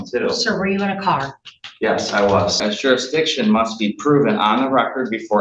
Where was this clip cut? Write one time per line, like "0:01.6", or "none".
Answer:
0:02.6

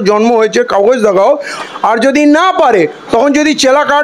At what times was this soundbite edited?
0:01.5

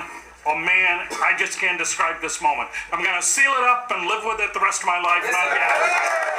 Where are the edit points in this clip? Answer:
none

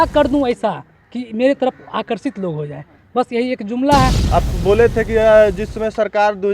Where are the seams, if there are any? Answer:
0:04.2

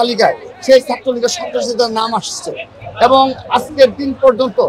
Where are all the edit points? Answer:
none

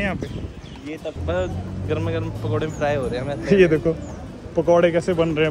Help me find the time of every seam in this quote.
0:01.2

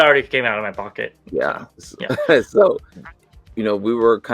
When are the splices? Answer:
0:02.9

